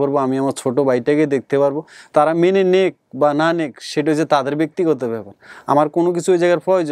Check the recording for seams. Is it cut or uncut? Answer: uncut